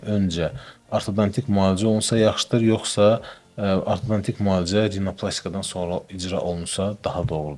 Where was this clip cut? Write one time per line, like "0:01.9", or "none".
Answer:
none